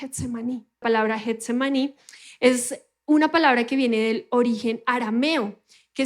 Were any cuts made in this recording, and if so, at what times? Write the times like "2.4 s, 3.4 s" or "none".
1.0 s